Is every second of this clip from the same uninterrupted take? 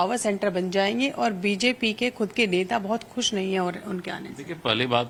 yes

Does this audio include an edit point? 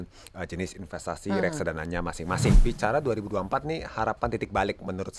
yes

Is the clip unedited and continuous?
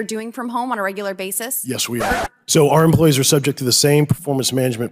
no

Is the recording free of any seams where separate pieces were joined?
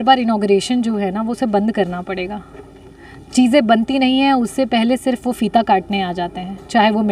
yes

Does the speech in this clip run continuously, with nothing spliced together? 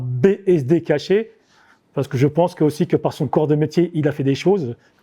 yes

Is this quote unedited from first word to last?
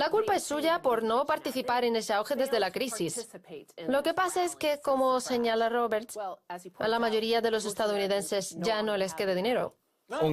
yes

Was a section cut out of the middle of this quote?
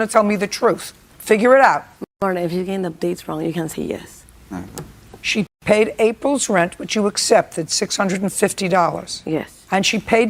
no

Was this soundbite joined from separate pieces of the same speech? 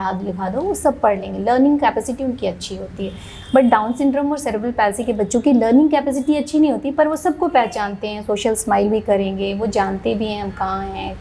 no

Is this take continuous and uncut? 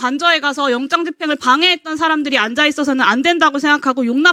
yes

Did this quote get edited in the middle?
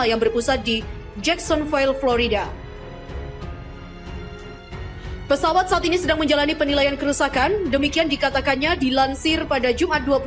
yes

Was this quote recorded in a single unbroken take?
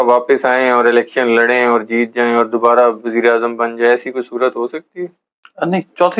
yes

